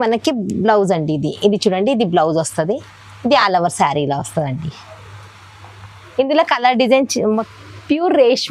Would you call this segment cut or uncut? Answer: cut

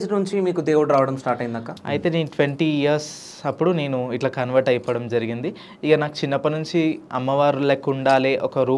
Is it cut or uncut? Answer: cut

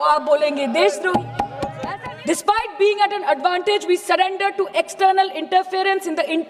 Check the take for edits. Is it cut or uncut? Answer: cut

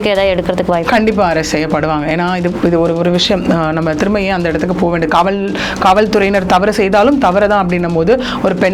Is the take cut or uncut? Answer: uncut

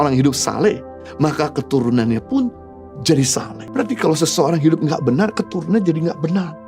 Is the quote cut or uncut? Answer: cut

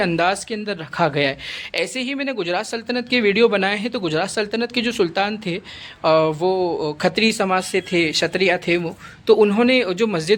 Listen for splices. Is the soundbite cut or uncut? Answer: uncut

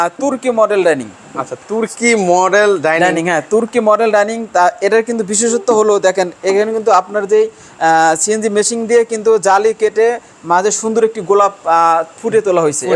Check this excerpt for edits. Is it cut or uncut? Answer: uncut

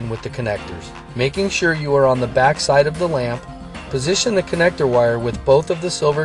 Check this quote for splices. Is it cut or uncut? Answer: cut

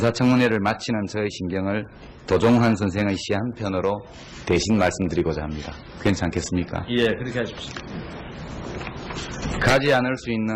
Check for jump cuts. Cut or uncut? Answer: cut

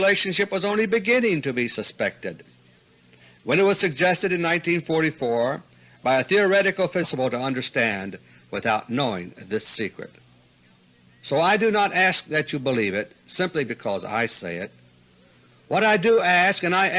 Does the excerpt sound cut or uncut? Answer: uncut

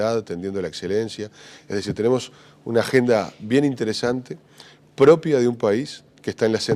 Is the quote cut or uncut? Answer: uncut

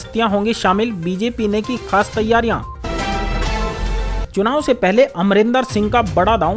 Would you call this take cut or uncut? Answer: cut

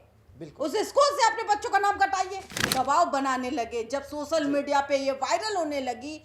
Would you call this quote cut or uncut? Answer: cut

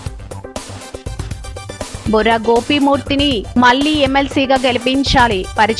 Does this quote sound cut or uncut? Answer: uncut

